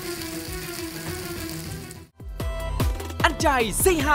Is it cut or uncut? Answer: cut